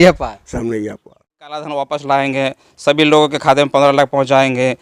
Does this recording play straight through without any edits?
no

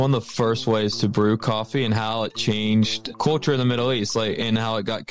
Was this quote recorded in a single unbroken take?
no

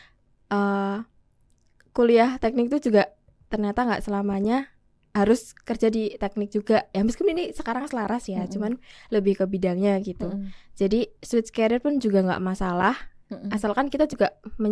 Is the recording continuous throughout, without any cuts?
yes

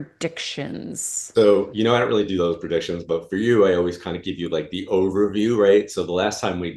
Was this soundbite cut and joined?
no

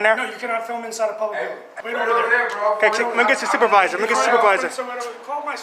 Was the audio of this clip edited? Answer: yes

